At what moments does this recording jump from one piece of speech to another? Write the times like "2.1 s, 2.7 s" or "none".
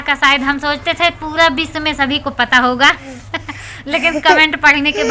none